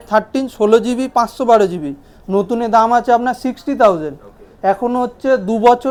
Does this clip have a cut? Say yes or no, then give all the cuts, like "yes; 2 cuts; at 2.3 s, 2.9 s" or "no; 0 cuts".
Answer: no; 0 cuts